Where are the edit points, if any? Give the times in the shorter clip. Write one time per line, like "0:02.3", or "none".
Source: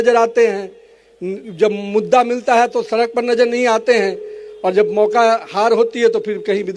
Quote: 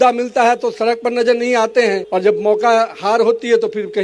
0:02.0